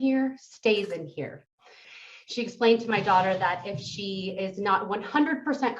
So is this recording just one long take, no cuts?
no; 1 cut; at 1.7 s

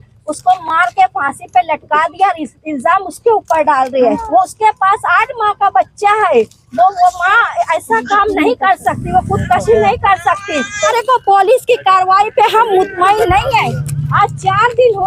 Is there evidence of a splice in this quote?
yes; 2 cuts; at 4.2 s, 10.9 s

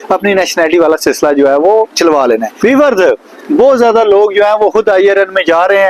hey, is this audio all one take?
no; 1 cut; at 2.6 s

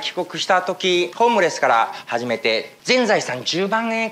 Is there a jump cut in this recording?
yes; 2 cuts; at 1.1 s, 2.7 s

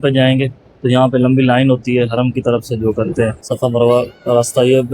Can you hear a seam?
yes; 1 cut; at 3.4 s

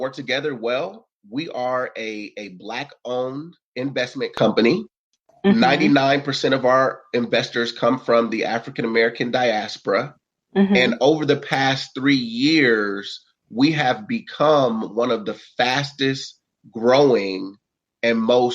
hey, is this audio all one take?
no; 1 cut; at 3.6 s

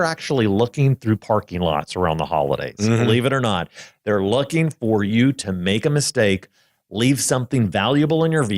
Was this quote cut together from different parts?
no; 0 cuts

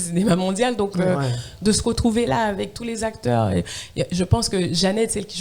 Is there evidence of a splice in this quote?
no; 0 cuts

